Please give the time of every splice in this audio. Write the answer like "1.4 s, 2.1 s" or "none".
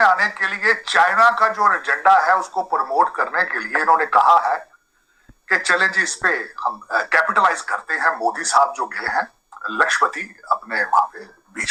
none